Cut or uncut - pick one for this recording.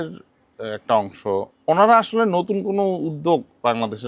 cut